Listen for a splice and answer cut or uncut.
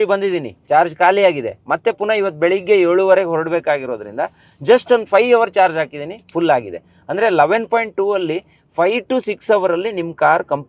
uncut